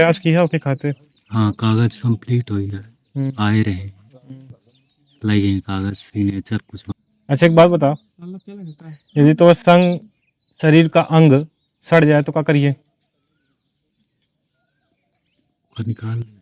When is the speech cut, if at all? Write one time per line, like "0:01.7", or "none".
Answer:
0:06.8